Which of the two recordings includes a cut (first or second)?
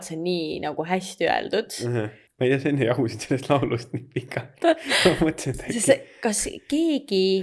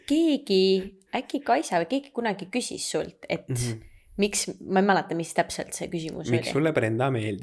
first